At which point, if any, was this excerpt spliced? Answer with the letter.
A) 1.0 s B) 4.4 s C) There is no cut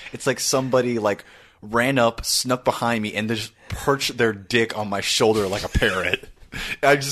C